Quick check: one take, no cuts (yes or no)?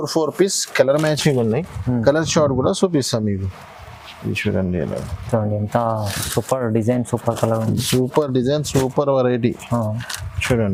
yes